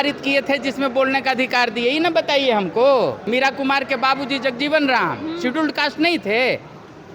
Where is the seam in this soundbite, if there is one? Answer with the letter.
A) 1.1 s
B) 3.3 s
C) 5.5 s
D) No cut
B